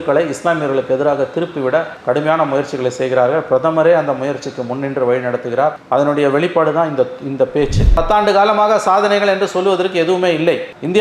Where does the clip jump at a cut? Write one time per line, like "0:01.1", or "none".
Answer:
0:07.9